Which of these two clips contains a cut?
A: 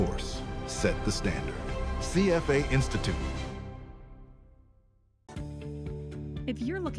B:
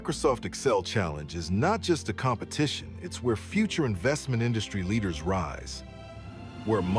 A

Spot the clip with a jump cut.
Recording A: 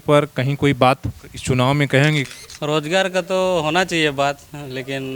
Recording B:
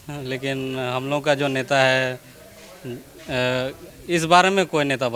A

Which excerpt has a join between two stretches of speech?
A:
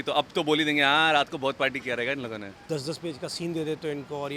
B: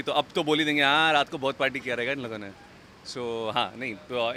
A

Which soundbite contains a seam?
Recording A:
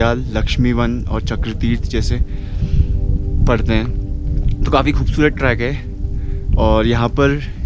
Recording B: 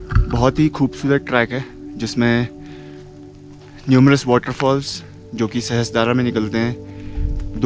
B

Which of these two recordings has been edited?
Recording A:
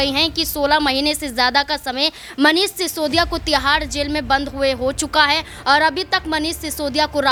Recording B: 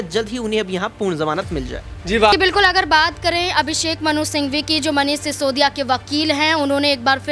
B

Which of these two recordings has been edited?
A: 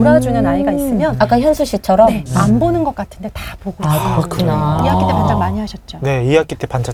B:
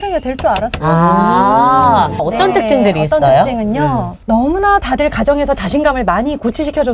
B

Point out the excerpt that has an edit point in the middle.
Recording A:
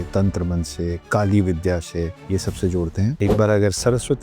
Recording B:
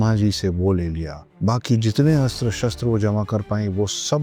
A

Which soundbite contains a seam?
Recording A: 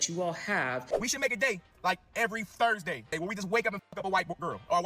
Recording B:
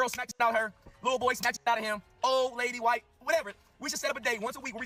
A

